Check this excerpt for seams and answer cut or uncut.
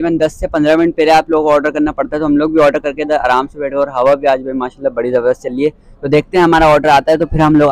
uncut